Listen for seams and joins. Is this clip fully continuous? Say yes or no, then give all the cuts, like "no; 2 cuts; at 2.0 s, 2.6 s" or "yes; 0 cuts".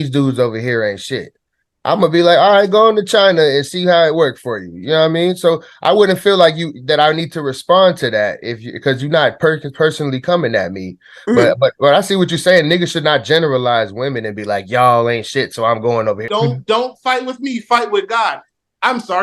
no; 1 cut; at 16.2 s